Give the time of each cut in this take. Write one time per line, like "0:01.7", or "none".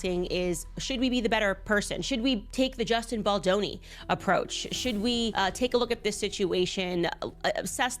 0:05.3